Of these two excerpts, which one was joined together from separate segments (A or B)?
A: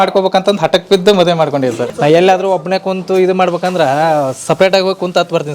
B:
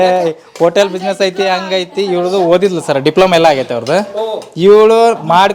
A